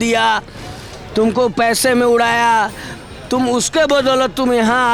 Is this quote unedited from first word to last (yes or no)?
yes